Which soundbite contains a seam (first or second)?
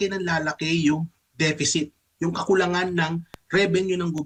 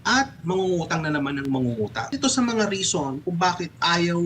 second